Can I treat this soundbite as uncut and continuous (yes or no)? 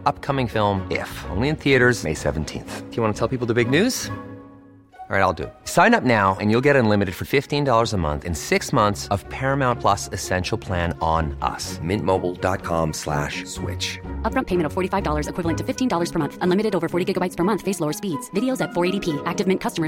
yes